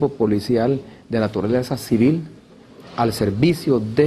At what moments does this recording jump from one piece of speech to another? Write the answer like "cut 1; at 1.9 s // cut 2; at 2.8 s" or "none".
cut 1; at 2.2 s